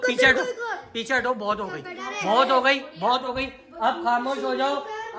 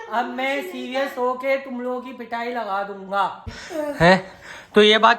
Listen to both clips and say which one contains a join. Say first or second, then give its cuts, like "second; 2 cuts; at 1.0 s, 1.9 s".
second; 1 cut; at 3.6 s